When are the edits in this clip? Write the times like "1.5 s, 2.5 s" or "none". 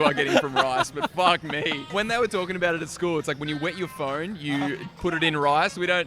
1.9 s